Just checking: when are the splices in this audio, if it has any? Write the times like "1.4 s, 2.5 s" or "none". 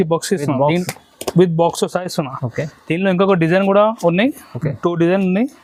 none

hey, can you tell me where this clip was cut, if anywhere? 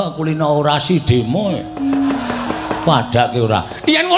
none

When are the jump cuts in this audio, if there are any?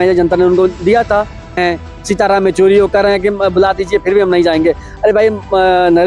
1.6 s

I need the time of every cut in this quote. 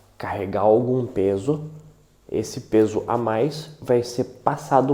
none

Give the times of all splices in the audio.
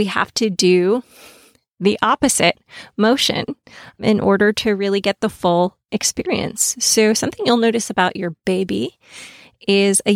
none

